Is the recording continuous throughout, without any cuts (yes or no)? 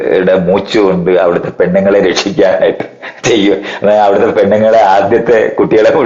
yes